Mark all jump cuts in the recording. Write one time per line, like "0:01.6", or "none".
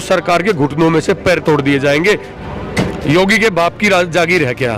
0:02.3

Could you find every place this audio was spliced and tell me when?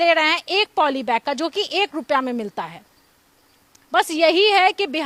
none

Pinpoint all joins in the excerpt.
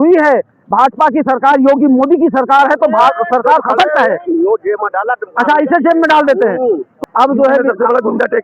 0:06.9

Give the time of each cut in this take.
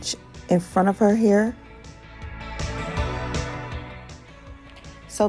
none

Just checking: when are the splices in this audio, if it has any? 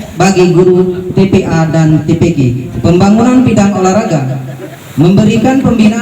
0:02.8

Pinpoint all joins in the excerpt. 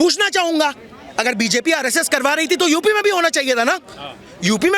none

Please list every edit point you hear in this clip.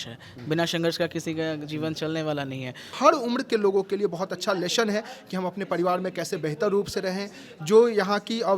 0:03.0

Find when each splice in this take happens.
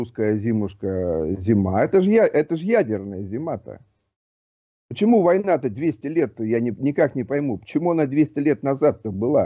none

